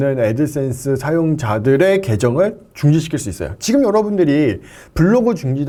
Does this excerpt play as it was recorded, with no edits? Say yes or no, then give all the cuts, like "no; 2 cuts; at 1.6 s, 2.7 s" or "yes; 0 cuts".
yes; 0 cuts